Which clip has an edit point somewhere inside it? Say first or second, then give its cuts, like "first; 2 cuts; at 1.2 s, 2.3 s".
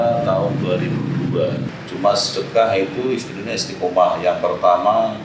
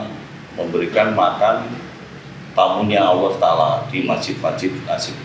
first; 1 cut; at 1.7 s